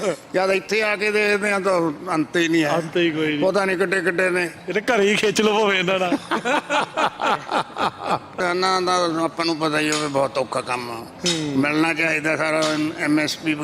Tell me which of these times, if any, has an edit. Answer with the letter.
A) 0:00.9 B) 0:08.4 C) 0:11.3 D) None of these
B